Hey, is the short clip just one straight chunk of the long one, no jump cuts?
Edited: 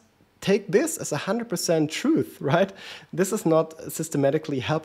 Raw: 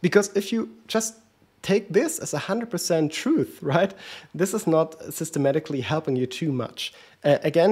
yes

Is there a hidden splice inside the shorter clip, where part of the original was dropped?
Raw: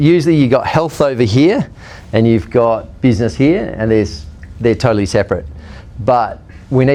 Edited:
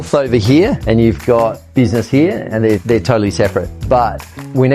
yes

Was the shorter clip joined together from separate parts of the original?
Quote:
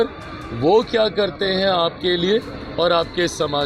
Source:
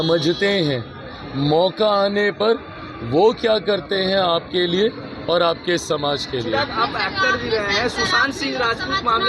no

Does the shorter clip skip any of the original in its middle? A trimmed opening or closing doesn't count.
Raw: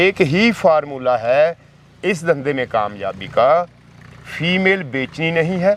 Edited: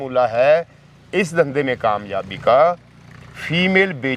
no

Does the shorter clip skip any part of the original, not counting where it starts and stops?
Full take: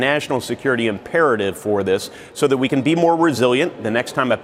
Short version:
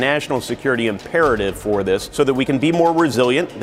yes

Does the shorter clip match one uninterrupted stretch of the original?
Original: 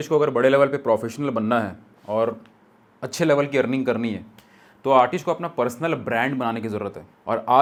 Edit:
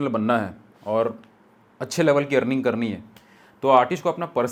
yes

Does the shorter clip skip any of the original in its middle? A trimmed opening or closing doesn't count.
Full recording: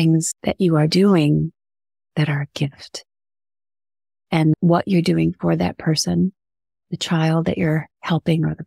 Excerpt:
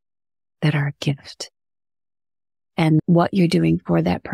no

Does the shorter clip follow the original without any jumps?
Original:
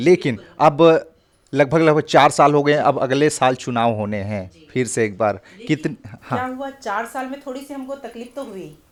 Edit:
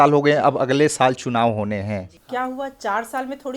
no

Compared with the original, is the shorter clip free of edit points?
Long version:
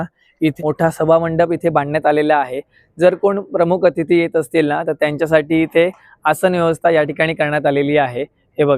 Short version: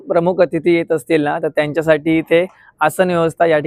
yes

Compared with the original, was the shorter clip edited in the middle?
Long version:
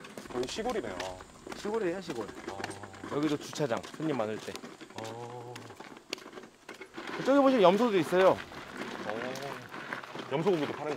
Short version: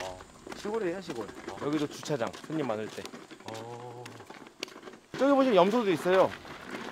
yes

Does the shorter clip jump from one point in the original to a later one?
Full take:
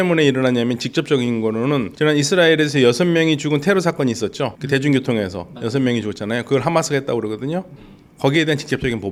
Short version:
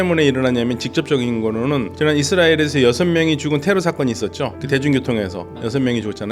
no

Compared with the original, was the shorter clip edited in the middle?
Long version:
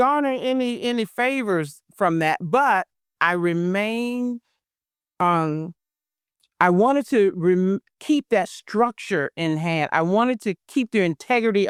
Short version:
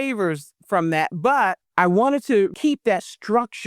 yes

